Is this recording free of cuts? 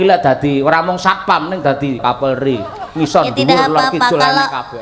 no; 1 cut; at 2.0 s

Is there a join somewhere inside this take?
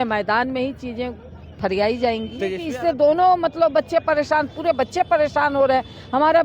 yes; 1 cut; at 2.6 s

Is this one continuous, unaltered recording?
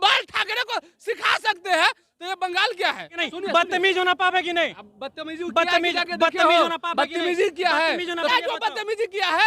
no; 2 cuts; at 3.2 s, 8.3 s

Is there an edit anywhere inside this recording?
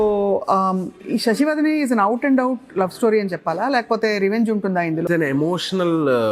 yes; 1 cut; at 5.0 s

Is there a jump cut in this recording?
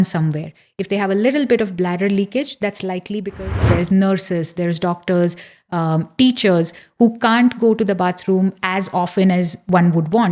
yes; 1 cut; at 3.3 s

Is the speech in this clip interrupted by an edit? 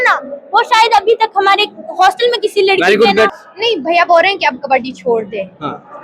yes; 1 cut; at 3.3 s

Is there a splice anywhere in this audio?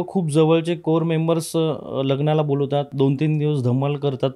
yes; 1 cut; at 2.9 s

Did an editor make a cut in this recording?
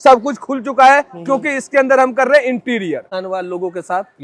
yes; 1 cut; at 3.1 s

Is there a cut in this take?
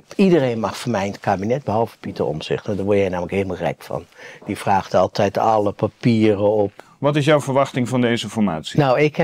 yes; 1 cut; at 6.7 s

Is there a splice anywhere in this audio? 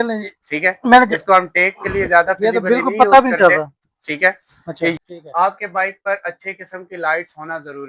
yes; 1 cut; at 5.0 s

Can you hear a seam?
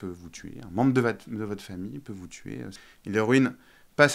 yes; 1 cut; at 2.8 s

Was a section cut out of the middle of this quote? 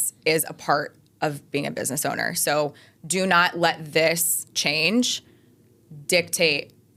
no; 0 cuts

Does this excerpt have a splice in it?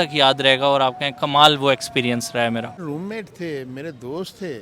yes; 1 cut; at 2.8 s

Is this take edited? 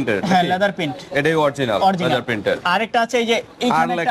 no; 0 cuts

